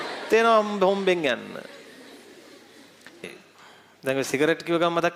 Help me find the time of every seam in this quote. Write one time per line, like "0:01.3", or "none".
0:03.2

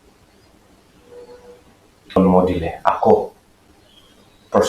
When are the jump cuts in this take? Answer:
0:02.1

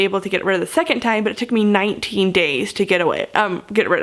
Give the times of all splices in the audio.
none

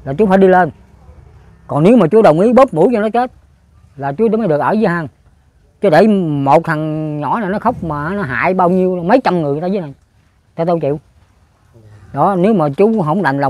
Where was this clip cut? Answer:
none

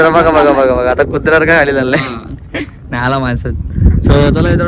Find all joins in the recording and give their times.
0:02.5

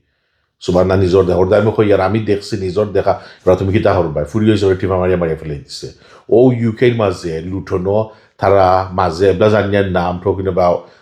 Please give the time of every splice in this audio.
none

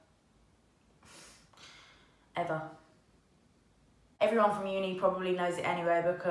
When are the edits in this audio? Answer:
0:04.1

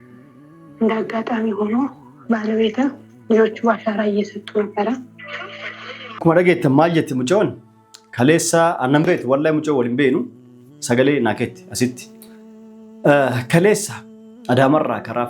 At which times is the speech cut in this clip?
0:06.2

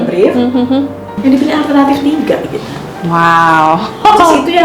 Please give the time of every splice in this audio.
0:01.1

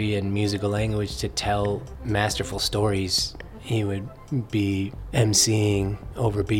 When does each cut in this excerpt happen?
0:03.9
0:05.0

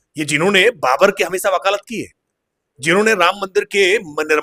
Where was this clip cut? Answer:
none

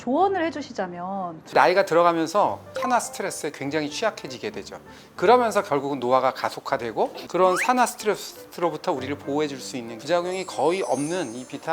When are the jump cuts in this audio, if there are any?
0:01.5
0:02.7
0:07.2

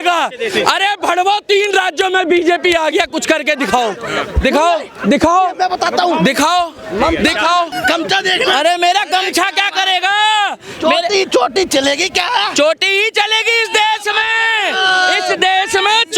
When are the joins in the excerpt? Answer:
0:07.7

